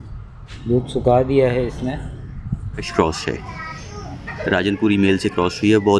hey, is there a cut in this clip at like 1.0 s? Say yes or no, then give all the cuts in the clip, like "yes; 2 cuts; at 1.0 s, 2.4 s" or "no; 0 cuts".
no; 1 cut; at 2.9 s